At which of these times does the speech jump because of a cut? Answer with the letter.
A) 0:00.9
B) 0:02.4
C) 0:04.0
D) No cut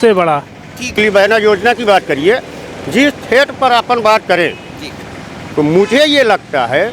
A